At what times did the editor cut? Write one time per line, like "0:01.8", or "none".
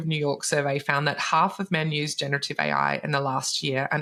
none